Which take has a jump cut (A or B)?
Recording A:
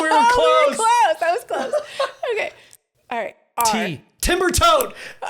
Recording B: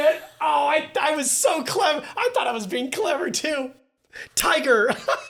A